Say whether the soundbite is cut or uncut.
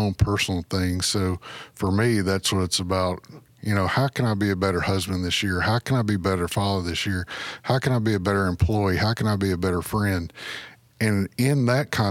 uncut